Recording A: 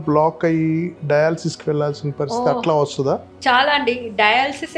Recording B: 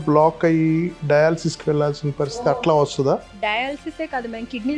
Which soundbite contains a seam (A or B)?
B